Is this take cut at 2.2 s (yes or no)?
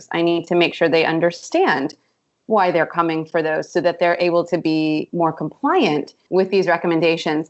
no